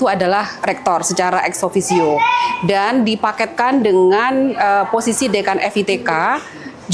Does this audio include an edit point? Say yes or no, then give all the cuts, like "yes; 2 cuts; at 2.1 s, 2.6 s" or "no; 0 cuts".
no; 0 cuts